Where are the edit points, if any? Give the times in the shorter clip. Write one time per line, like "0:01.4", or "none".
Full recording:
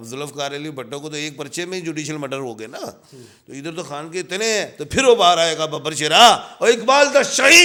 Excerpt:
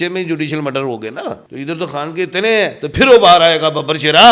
0:01.5